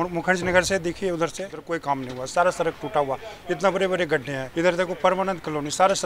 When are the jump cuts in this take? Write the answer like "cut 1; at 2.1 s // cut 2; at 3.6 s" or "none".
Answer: cut 1; at 1.5 s // cut 2; at 4.4 s